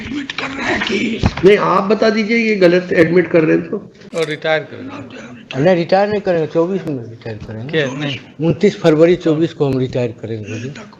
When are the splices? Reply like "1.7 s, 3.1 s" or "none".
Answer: 4.0 s